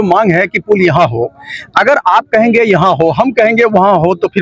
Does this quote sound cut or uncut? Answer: uncut